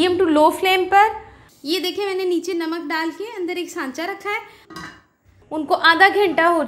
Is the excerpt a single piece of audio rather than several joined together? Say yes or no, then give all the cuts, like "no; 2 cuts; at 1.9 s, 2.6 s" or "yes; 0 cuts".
no; 1 cut; at 5.1 s